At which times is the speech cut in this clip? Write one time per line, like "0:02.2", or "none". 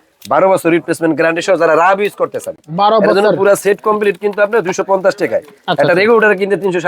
none

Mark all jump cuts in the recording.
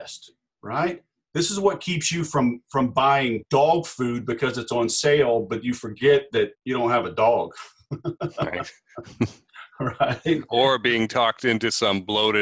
0:03.4
0:06.6

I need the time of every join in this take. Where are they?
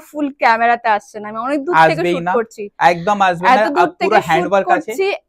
none

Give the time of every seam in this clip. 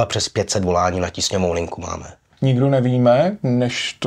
0:02.3

